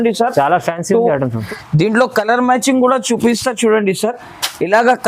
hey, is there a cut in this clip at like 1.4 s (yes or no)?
yes